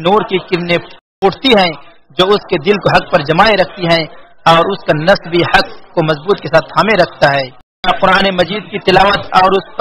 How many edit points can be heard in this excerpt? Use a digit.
2